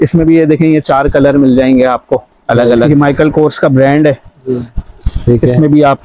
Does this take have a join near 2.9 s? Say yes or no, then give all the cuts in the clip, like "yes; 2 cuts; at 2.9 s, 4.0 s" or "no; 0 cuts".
yes; 1 cut; at 2.9 s